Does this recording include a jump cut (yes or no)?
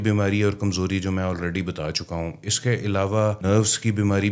yes